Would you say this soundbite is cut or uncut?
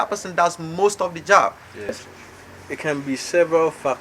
cut